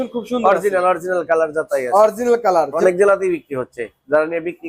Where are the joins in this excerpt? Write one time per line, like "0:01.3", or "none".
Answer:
0:02.7